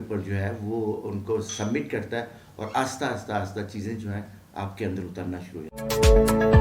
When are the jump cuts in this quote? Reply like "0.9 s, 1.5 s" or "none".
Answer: 5.7 s